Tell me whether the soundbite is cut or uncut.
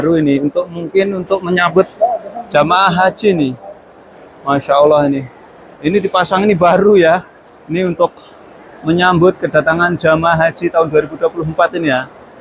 uncut